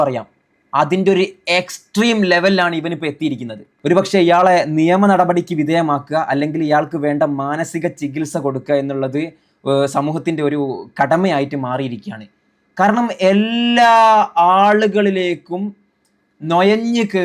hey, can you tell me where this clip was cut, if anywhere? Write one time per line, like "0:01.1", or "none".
none